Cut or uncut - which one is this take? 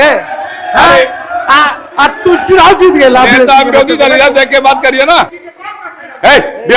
cut